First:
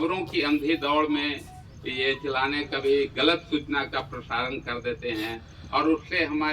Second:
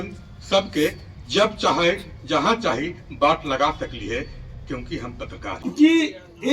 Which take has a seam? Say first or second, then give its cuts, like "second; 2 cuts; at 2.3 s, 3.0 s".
second; 1 cut; at 5.6 s